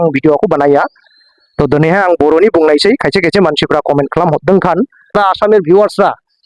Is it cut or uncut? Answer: cut